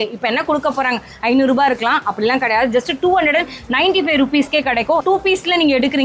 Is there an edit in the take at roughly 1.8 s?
no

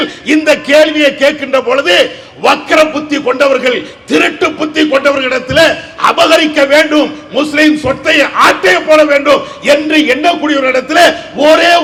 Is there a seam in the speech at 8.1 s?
no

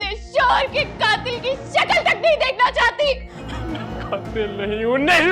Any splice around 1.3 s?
no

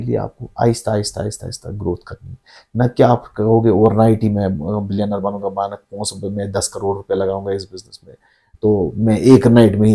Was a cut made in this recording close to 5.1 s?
no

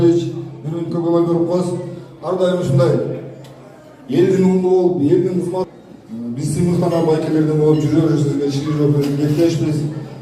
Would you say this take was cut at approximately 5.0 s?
no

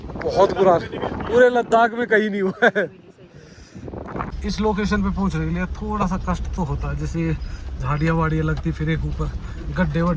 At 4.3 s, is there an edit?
yes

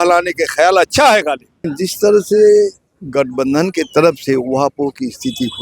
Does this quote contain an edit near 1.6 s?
yes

